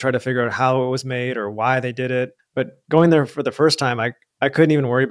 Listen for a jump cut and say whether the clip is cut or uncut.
cut